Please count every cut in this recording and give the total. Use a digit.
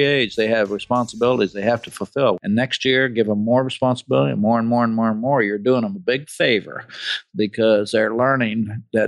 1